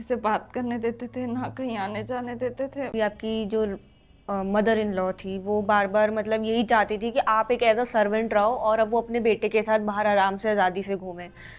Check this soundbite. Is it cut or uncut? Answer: cut